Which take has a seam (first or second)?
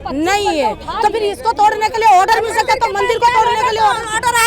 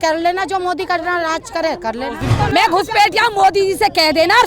second